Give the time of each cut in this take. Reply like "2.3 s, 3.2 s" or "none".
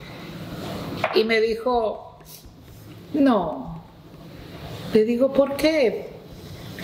none